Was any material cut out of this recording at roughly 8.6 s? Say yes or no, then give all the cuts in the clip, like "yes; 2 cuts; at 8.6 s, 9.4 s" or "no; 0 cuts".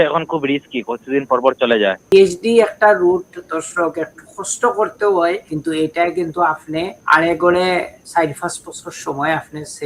no; 3 cuts; at 2.1 s, 5.5 s, 7.0 s